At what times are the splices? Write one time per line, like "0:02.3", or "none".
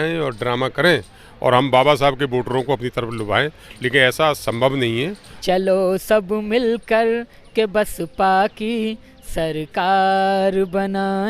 0:05.2